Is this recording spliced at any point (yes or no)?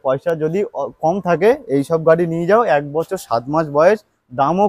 no